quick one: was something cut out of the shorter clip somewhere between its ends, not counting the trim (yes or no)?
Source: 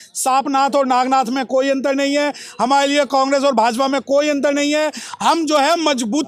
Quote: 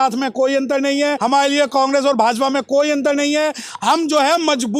yes